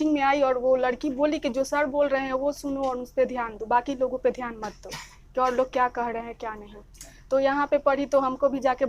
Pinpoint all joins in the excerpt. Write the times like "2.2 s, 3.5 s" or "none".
none